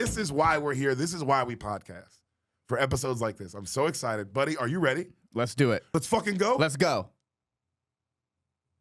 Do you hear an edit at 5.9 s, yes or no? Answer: yes